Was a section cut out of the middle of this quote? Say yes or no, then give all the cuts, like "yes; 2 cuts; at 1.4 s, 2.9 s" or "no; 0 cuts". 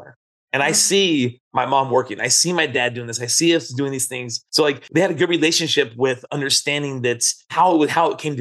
yes; 2 cuts; at 4.7 s, 7.5 s